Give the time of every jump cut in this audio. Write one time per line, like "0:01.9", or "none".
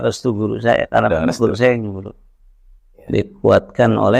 none

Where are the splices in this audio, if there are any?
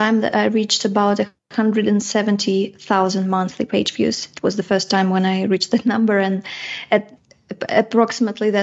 none

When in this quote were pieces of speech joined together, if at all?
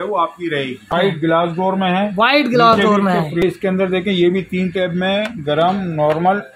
0:00.9
0:03.4

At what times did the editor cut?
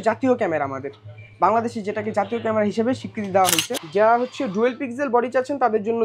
0:03.7

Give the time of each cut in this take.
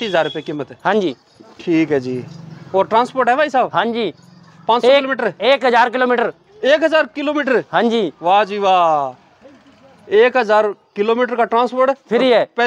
none

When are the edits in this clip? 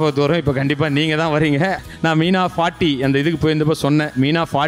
0:01.8

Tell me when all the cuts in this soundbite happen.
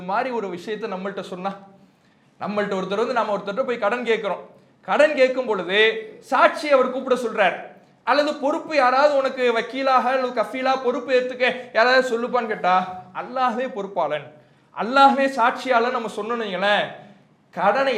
none

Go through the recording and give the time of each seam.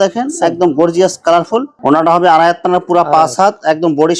0:01.7

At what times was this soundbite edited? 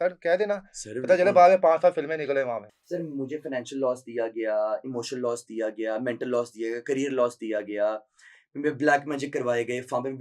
0:02.7

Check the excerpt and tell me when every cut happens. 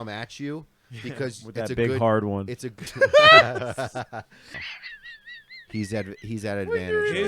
0:04.5

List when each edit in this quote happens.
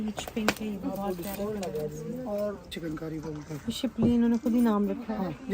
0:02.8

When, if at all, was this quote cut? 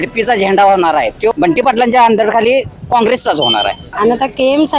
0:01.3
0:03.8

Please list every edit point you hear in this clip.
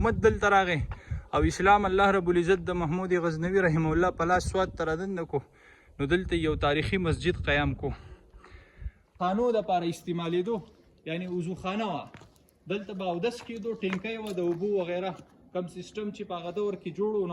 0:09.1

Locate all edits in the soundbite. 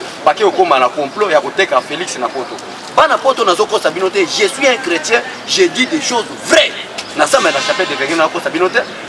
0:07.3

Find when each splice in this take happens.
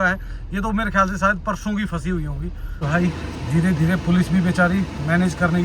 0:02.8

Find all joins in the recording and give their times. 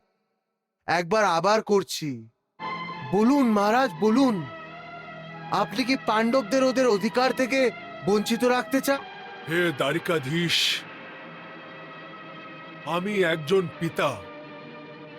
0:02.7
0:09.0

